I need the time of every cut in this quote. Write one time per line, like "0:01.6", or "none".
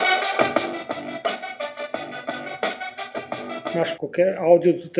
0:03.9